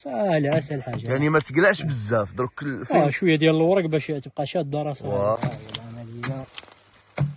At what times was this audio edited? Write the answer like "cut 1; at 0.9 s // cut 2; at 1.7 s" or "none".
cut 1; at 5.4 s